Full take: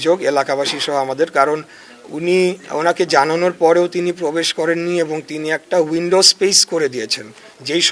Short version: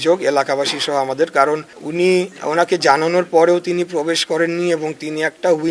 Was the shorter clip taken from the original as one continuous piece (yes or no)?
no